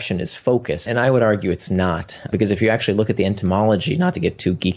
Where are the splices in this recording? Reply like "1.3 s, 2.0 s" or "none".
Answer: 0.8 s, 2.3 s